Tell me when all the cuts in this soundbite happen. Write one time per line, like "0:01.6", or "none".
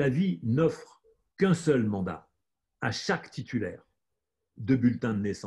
none

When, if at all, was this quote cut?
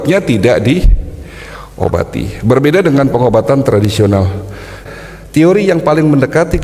0:04.7

